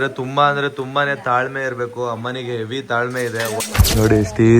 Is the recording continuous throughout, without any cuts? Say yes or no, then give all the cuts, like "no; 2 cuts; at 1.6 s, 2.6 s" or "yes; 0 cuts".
no; 1 cut; at 3.5 s